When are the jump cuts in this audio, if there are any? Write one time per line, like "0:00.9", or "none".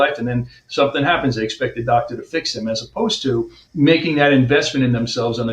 none